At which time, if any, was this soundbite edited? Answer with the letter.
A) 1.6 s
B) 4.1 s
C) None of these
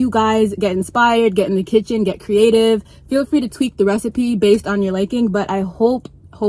C